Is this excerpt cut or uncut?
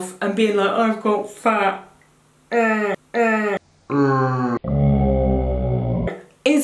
uncut